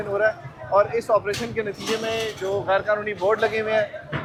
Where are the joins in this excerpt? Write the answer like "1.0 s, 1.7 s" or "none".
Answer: none